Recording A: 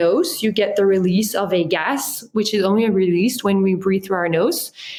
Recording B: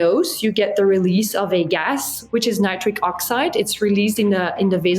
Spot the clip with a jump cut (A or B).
B